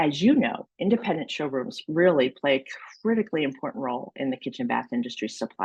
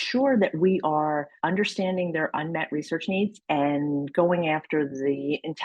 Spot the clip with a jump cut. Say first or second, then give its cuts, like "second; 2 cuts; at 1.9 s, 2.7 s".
second; 1 cut; at 1.3 s